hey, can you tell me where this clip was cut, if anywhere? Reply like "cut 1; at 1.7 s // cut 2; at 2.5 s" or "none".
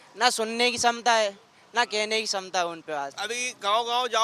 cut 1; at 3.2 s